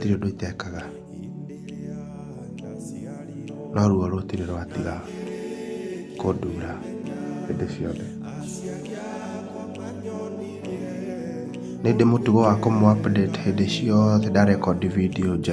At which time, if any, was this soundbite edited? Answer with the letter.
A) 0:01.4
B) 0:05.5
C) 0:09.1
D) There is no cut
D